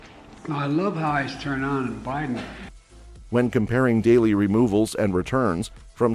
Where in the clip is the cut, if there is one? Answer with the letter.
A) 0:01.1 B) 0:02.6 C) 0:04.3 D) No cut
D